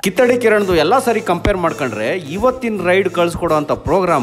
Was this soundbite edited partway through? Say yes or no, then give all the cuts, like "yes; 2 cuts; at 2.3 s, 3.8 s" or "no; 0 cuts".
no; 0 cuts